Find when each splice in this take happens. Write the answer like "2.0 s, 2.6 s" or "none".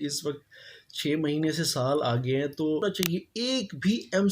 2.8 s